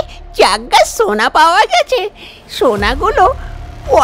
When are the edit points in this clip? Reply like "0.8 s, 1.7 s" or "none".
none